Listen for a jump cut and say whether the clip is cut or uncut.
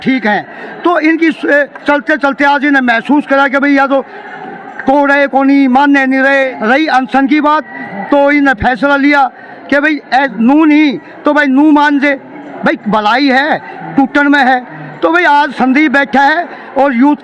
cut